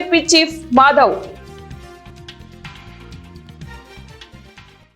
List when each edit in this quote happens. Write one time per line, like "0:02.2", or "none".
0:02.0
0:03.5